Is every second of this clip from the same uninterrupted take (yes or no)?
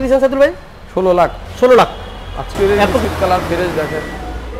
no